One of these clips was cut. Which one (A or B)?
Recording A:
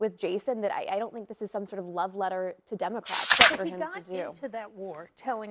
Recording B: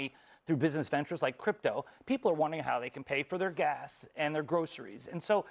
A